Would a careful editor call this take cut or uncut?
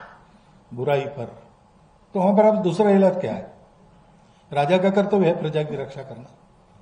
uncut